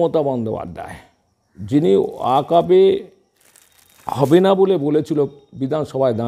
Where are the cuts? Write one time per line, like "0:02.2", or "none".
none